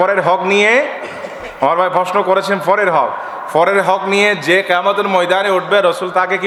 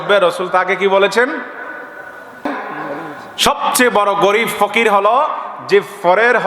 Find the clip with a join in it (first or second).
second